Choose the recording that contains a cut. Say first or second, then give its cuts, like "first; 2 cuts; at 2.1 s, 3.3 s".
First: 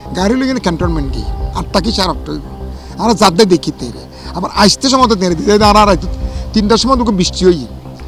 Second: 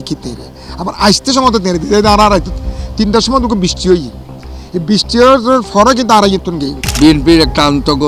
second; 1 cut; at 6.9 s